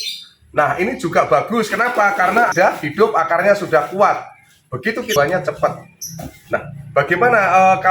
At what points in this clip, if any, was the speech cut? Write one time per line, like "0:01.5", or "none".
0:02.5
0:05.1